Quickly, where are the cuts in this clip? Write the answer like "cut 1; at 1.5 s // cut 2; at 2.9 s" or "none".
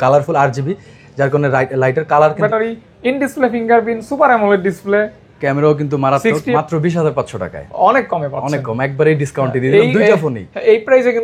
cut 1; at 2.4 s // cut 2; at 6.5 s